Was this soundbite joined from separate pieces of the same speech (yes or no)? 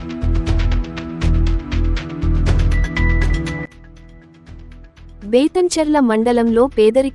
yes